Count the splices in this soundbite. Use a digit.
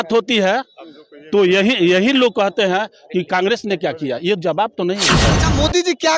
1